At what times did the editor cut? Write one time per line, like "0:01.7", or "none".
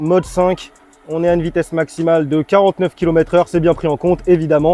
none